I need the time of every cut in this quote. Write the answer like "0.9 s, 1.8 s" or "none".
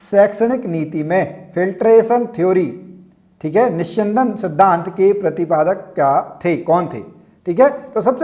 none